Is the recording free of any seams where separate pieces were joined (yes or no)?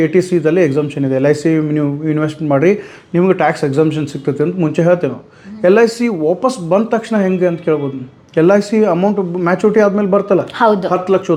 yes